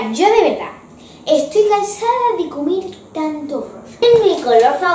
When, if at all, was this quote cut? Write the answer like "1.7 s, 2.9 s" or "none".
4.0 s